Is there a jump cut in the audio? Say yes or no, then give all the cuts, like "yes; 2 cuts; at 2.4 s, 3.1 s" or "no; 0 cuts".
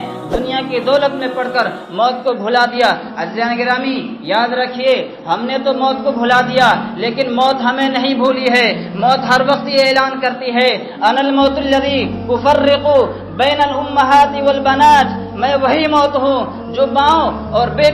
no; 0 cuts